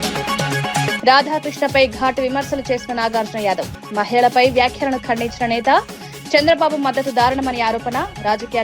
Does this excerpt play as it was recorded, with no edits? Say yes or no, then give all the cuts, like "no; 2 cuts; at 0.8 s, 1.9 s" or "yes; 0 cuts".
no; 1 cut; at 1.0 s